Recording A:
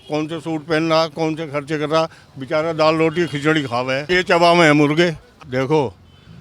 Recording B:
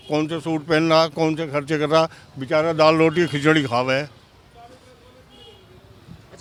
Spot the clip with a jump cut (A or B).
A